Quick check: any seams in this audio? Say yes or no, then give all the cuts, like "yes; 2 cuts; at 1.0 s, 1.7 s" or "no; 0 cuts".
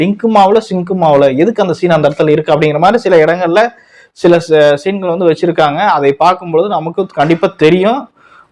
no; 0 cuts